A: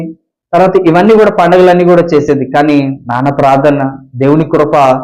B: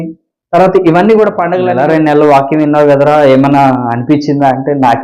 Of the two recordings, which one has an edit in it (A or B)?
B